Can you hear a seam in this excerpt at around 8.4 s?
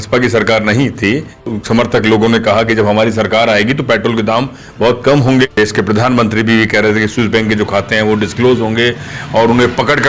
no; 2 cuts; at 1.5 s, 5.5 s

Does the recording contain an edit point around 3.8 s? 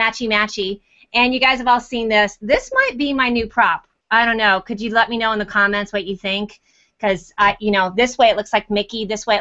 no; 0 cuts

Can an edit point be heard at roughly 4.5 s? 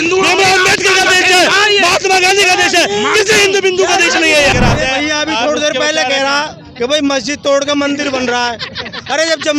yes; 1 cut; at 4.5 s

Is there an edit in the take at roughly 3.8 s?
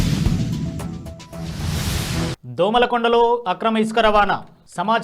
no; 1 cut; at 2.4 s

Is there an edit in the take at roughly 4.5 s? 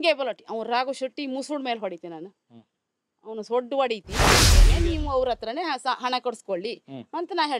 yes; 1 cut; at 4.5 s

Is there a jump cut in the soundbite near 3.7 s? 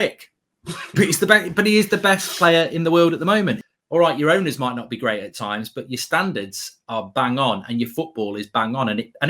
yes; 1 cut; at 3.7 s

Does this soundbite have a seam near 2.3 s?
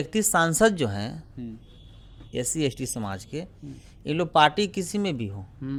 no; 0 cuts

